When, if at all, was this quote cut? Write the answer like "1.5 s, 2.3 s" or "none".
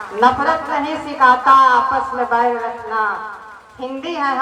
none